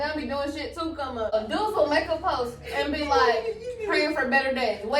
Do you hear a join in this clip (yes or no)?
yes